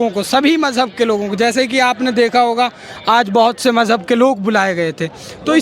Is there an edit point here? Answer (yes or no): no